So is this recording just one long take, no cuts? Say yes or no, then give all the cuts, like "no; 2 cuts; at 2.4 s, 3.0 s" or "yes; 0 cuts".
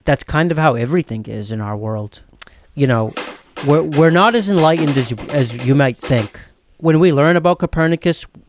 no; 2 cuts; at 2.2 s, 6.5 s